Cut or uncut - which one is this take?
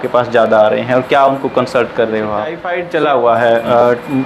cut